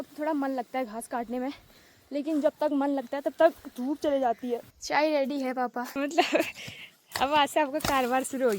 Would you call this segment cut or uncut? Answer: cut